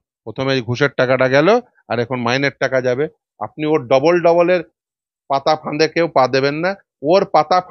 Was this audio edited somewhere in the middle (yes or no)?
no